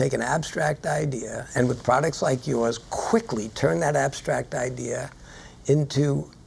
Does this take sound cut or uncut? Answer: uncut